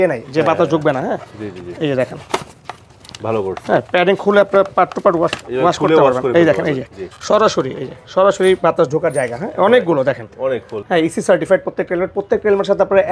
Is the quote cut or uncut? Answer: cut